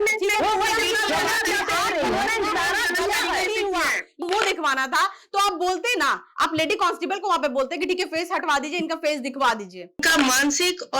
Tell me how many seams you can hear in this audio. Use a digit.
2